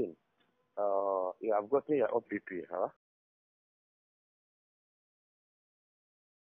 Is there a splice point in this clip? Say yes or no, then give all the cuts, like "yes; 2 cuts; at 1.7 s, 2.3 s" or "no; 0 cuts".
no; 0 cuts